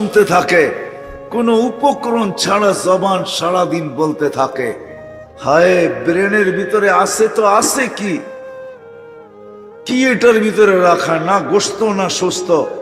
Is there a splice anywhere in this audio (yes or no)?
no